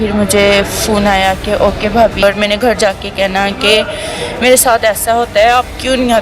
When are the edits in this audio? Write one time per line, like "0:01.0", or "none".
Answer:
0:02.2